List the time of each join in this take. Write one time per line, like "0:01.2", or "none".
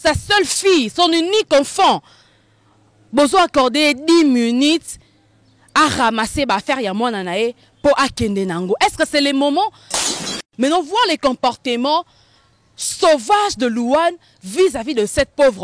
0:10.4